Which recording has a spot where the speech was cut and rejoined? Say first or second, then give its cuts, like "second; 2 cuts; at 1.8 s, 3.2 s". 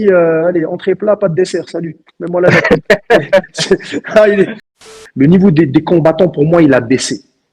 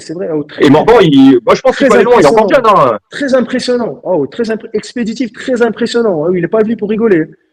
first; 1 cut; at 4.8 s